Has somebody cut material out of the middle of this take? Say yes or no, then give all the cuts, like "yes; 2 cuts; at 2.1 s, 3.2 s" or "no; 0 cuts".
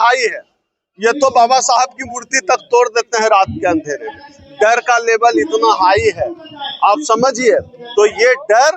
no; 0 cuts